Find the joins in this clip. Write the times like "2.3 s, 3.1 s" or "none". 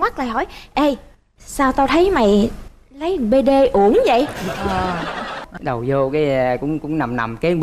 5.4 s